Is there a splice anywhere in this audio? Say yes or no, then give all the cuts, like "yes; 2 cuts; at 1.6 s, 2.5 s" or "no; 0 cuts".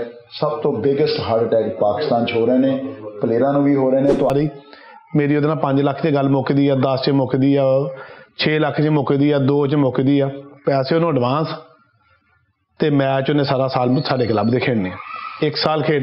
yes; 1 cut; at 4.3 s